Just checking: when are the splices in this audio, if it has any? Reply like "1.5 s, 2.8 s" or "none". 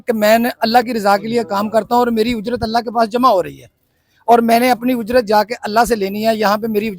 none